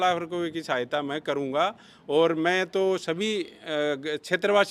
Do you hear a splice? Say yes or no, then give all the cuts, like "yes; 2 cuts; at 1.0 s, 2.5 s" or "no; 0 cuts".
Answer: no; 0 cuts